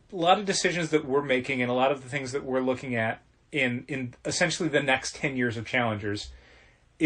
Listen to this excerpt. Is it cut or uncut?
uncut